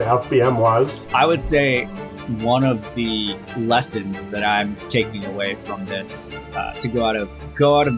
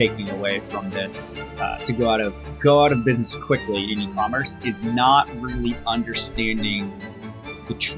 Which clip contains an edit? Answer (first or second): first